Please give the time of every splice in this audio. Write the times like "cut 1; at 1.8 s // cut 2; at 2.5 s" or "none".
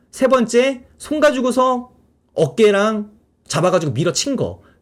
none